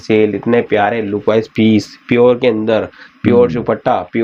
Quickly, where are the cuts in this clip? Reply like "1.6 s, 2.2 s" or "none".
none